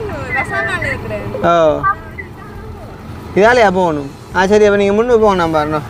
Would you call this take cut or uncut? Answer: uncut